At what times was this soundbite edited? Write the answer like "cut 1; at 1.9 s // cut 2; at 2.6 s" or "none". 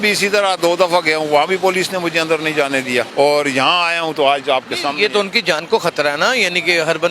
cut 1; at 3.1 s